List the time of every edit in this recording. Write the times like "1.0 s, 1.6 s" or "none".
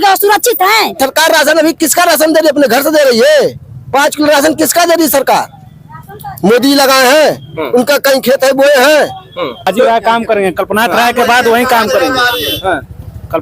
0.9 s, 9.7 s